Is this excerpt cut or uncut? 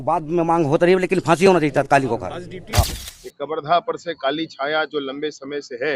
cut